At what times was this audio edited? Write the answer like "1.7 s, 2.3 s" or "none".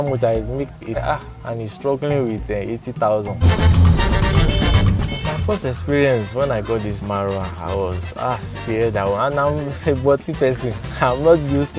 1.0 s, 3.5 s